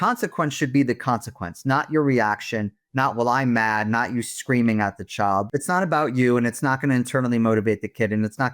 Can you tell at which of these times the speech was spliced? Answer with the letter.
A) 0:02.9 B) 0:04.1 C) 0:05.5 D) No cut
C